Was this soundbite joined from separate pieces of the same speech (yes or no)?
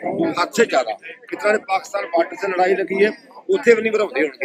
no